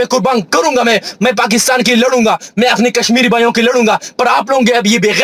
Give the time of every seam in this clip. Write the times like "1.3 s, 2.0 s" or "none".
none